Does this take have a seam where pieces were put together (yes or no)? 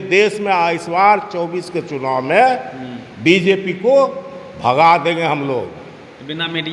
no